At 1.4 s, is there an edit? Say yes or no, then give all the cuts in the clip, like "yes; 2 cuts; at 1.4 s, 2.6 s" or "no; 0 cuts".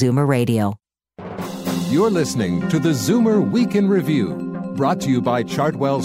yes; 1 cut; at 1.4 s